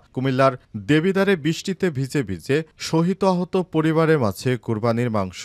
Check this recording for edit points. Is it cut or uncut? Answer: uncut